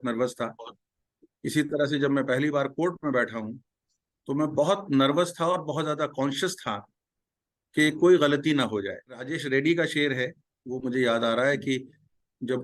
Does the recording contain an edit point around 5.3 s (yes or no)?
no